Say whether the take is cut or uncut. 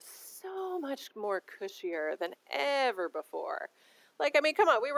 uncut